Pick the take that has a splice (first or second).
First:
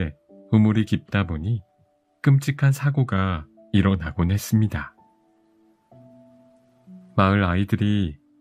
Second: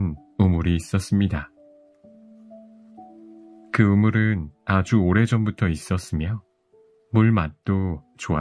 first